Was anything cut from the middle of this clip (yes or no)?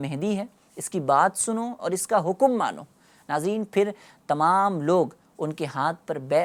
no